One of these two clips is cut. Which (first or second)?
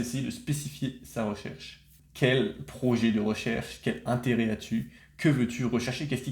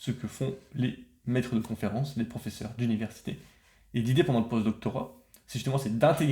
first